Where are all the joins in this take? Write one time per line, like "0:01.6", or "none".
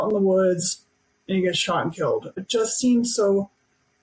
0:02.4